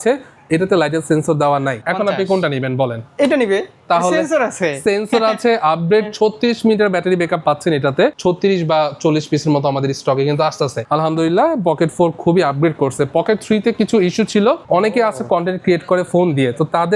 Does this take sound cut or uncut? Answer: cut